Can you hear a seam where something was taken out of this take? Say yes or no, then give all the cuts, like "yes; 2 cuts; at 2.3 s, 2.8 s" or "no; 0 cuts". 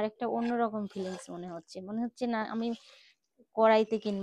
no; 0 cuts